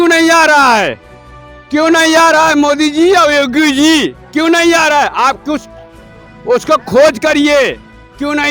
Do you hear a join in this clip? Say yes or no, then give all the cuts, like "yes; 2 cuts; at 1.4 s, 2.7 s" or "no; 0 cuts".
no; 0 cuts